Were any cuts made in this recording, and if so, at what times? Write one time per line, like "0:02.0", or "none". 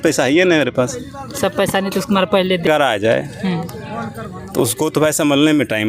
0:02.6